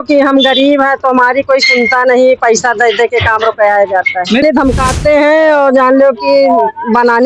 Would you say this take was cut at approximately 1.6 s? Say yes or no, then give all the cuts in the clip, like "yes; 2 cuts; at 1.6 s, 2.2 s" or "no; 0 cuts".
no; 1 cut; at 4.4 s